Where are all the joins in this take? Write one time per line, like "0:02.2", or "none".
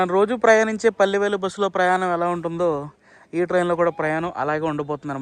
none